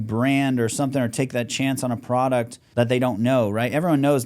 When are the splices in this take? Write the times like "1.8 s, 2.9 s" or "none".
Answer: 2.6 s